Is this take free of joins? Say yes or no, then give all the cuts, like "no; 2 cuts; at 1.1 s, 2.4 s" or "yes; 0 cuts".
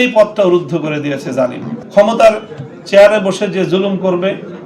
no; 1 cut; at 1.8 s